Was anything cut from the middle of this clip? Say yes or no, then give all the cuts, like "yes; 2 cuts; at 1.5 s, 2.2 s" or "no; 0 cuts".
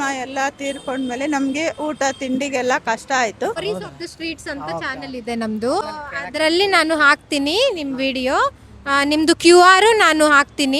yes; 2 cuts; at 3.6 s, 5.8 s